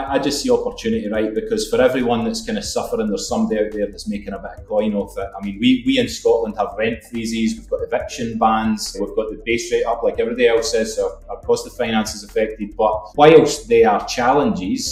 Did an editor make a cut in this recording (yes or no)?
no